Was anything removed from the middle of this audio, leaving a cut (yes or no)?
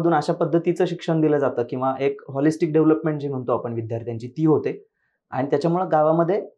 no